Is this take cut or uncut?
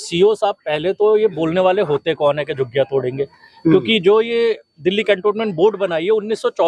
uncut